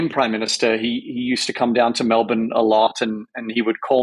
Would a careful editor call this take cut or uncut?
uncut